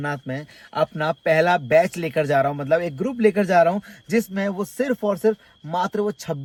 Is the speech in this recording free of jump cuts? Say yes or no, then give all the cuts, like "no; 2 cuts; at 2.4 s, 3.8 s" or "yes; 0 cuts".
yes; 0 cuts